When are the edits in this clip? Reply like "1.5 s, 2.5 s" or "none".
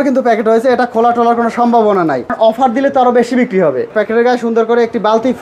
2.3 s, 3.9 s